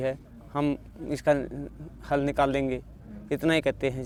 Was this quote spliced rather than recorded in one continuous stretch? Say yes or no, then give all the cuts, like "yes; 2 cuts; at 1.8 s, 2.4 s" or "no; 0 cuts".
no; 0 cuts